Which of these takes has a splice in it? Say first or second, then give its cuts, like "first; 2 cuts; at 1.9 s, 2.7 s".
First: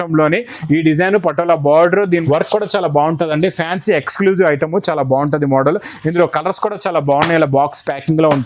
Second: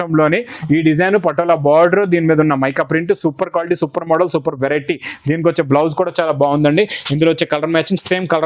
first; 1 cut; at 2.2 s